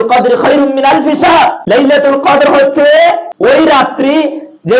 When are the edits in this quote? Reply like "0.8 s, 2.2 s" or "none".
1.6 s, 3.6 s